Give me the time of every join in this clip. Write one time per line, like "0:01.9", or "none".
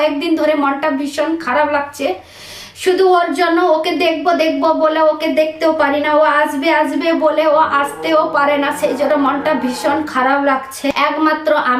0:10.9